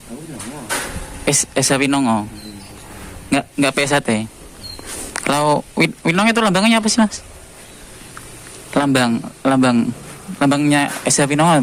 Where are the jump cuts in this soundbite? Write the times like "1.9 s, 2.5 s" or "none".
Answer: none

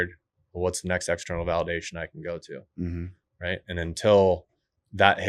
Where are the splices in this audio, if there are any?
none

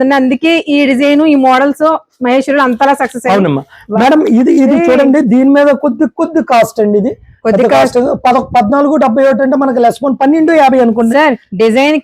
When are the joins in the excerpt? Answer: none

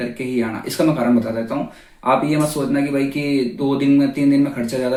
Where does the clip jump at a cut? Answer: none

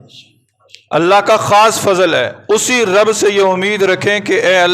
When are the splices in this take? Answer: 2.3 s

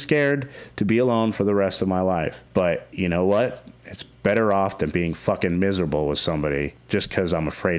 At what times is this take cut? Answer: 2.4 s, 6.8 s

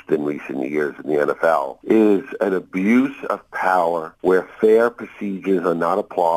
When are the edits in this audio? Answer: 1.7 s, 4.1 s

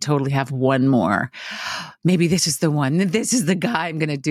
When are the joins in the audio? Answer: none

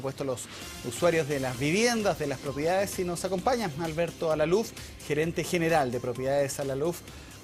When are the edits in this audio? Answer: 3.8 s

